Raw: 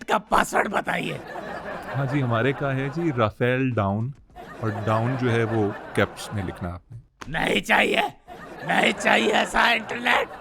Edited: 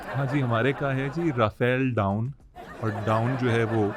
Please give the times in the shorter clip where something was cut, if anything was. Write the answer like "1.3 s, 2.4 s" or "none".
none